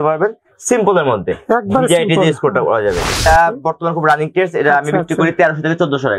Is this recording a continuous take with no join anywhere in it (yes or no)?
no